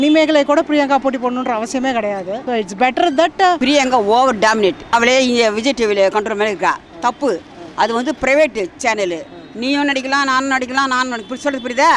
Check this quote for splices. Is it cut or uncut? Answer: cut